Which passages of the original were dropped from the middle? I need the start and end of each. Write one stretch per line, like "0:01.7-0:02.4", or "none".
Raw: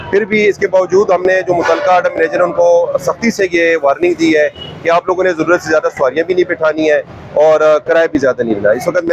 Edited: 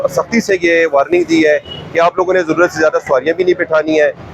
none